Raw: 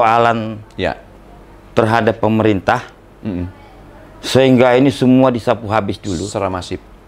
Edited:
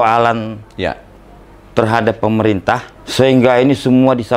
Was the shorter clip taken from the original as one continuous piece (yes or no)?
no